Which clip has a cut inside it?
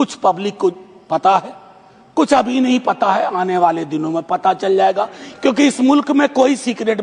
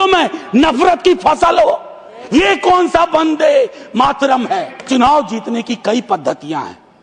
second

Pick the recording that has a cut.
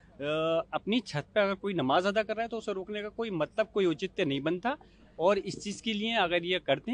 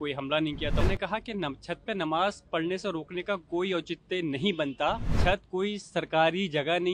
second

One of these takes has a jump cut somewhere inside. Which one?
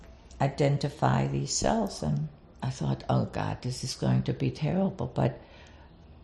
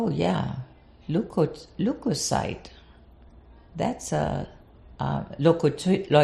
first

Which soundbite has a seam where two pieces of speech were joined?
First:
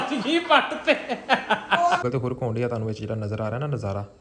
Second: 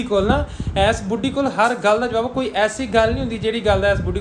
first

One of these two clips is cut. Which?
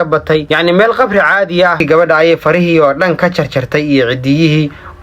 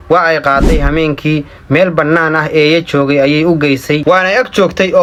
first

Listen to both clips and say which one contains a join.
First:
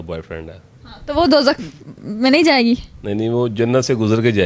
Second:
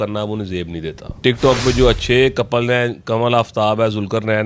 second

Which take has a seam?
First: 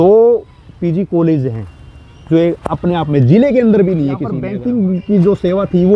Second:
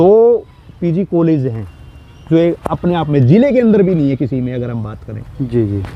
first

